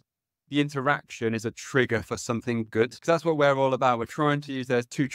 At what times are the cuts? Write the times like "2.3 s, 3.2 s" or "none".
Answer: 3.0 s